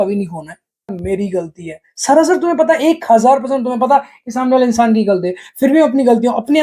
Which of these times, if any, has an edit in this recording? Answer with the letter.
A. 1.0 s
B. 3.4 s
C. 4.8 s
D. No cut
A